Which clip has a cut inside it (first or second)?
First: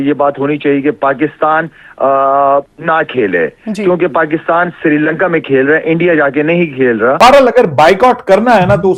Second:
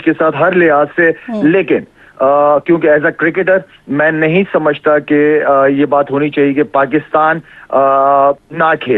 first